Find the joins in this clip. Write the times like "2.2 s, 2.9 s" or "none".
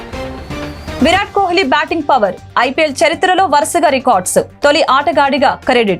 none